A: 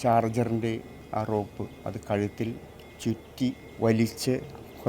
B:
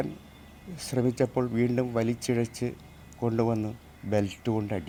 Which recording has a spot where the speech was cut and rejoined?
A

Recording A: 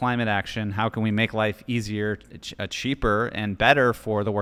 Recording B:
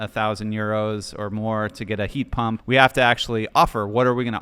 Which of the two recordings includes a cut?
B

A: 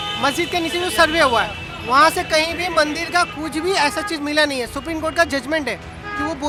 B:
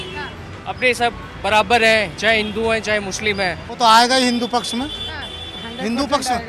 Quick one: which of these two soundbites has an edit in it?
B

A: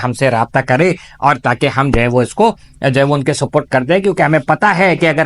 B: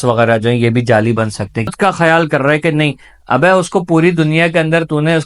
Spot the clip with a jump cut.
B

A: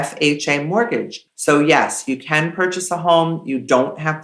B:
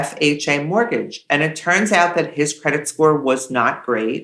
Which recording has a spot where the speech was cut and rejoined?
A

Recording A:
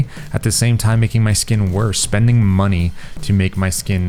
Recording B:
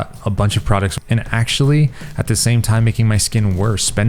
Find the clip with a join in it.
B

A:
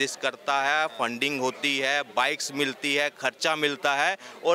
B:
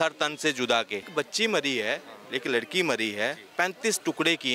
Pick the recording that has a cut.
B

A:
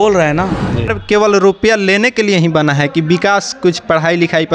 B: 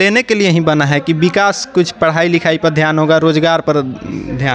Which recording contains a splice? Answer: A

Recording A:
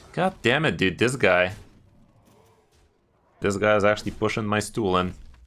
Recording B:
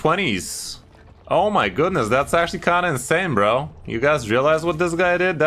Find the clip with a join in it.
A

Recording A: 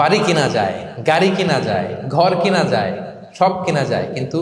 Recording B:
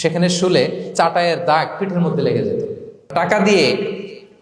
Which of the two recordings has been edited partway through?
B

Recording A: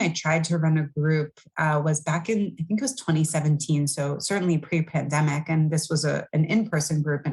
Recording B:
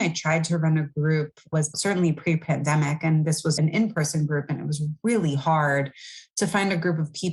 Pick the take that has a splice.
B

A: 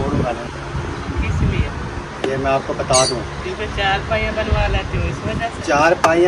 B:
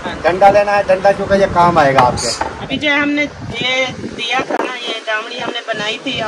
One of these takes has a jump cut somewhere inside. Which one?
B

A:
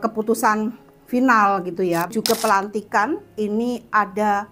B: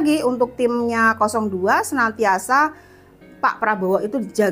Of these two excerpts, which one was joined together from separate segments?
A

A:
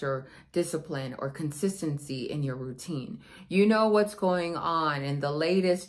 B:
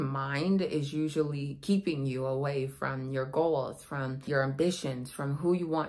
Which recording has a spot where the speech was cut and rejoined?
B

